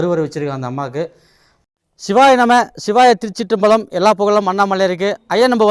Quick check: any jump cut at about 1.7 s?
yes; 1 cut; at 1.7 s

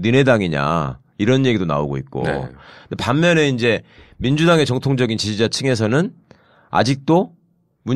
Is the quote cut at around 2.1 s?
no; 1 cut; at 6.5 s

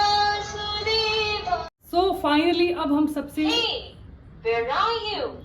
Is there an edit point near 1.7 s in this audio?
yes; 1 cut; at 1.7 s

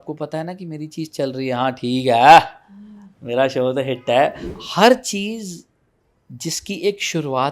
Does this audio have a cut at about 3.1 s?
no; 1 cut; at 4.5 s

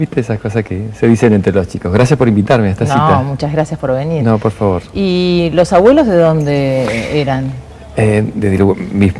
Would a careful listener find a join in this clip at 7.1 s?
yes; 1 cut; at 7.1 s

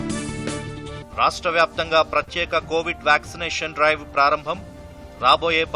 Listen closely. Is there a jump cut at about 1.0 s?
yes; 1 cut; at 1.0 s

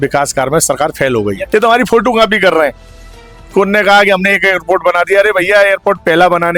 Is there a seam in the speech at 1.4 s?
yes; 1 cut; at 1.4 s

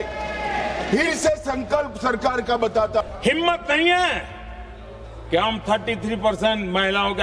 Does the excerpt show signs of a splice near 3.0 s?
yes; 1 cut; at 3.0 s

